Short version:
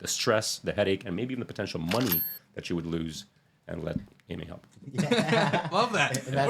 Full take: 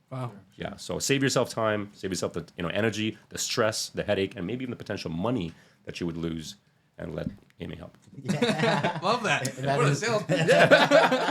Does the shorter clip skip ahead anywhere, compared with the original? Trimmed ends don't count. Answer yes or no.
no